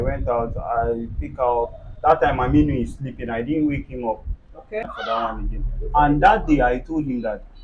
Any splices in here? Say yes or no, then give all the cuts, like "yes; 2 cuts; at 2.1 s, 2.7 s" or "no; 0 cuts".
yes; 1 cut; at 4.8 s